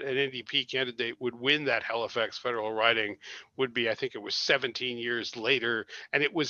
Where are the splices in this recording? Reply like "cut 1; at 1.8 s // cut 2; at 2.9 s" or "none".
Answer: none